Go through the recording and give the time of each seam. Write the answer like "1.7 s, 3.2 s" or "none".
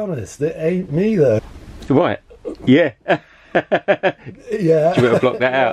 1.5 s